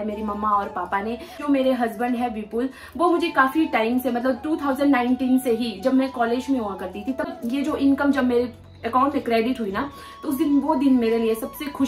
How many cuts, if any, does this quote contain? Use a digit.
2